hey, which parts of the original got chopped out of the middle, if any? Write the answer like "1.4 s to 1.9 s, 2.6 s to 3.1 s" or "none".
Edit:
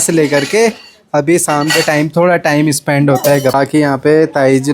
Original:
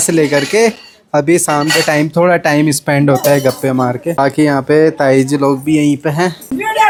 3.5 s to 4.2 s